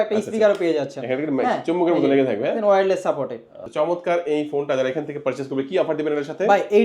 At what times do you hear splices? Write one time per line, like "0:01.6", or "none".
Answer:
0:03.6

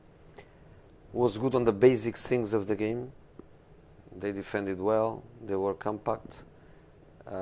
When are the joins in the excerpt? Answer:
0:05.6

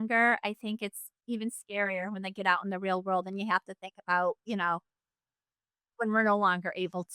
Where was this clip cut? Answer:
none

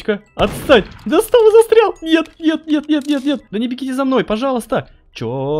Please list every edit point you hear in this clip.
0:03.5

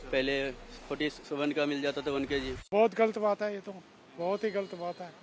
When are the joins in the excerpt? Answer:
0:02.7

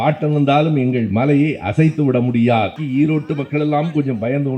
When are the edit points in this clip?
0:02.8

